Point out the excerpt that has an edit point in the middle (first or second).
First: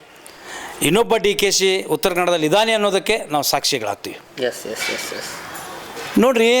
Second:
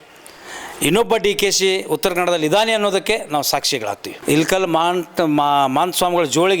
second